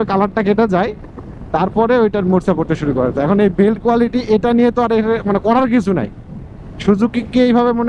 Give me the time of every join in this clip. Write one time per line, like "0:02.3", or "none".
none

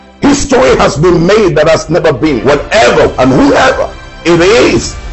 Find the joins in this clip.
0:02.4

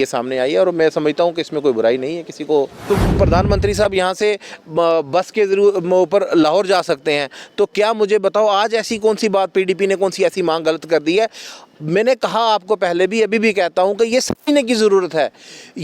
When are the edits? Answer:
0:02.8

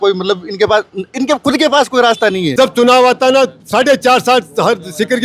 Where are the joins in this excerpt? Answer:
0:02.5

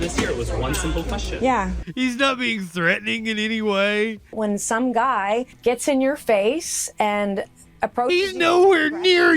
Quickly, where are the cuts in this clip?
0:01.8
0:04.4
0:05.6

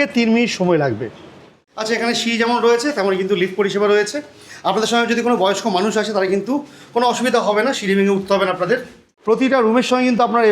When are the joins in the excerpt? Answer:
0:01.6
0:09.1

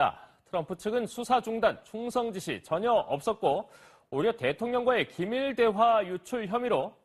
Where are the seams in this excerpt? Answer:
none

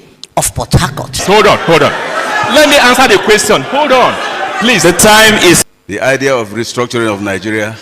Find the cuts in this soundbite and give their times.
0:01.2
0:05.6

